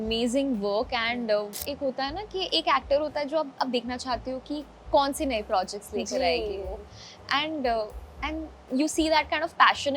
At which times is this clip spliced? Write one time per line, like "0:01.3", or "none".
0:01.6

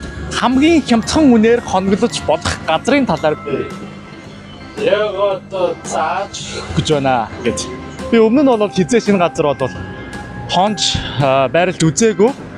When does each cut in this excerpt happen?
none

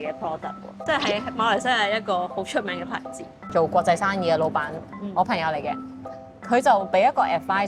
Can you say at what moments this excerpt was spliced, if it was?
0:03.5

